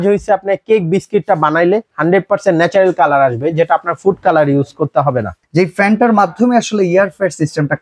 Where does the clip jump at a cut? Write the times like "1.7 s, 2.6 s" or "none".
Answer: 5.4 s